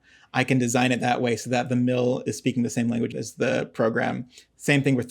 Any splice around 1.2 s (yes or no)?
no